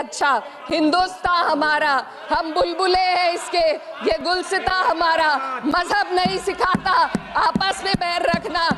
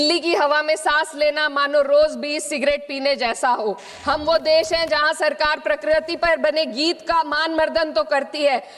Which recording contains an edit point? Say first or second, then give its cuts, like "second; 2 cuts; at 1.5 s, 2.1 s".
second; 1 cut; at 3.9 s